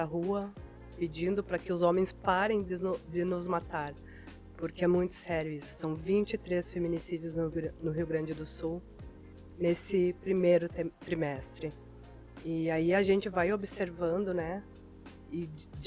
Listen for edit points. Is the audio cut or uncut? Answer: uncut